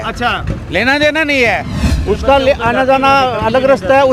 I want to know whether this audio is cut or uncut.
uncut